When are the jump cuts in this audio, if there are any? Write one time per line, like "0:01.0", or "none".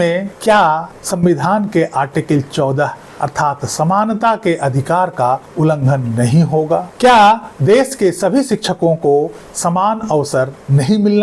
none

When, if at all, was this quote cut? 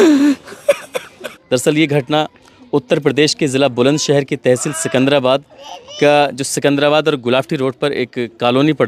0:01.3

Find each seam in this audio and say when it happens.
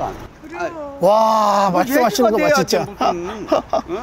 none

